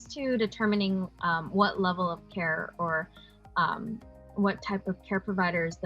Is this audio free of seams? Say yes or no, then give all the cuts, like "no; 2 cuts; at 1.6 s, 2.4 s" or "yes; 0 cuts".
yes; 0 cuts